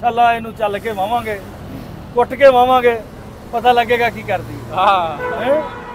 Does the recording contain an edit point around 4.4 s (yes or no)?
no